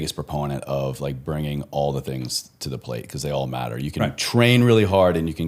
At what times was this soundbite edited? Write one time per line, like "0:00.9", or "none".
none